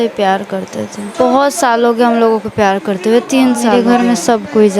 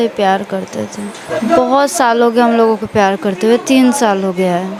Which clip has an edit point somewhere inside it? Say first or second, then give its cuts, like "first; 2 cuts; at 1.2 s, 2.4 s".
first; 2 cuts; at 1.2 s, 3.7 s